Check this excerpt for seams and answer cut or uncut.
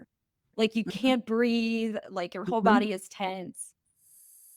uncut